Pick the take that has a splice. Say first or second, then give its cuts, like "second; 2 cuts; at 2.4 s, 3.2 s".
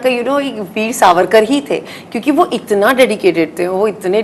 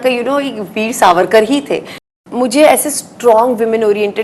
second; 1 cut; at 2.1 s